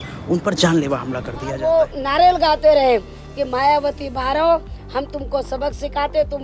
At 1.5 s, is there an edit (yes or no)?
yes